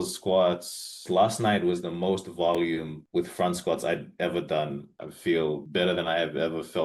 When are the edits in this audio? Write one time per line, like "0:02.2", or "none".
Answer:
0:01.0
0:05.0